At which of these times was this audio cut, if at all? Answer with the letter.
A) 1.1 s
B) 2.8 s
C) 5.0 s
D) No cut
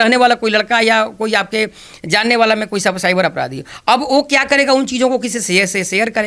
D